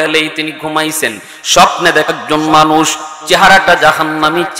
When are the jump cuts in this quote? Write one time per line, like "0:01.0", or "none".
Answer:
0:02.1